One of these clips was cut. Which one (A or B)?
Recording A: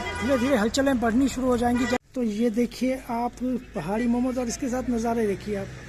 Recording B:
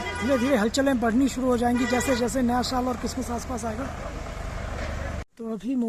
A